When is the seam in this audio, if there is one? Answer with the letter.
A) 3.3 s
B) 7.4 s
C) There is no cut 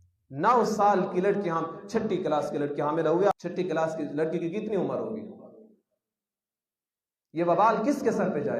A